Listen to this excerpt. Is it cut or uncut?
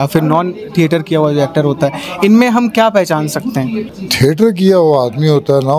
uncut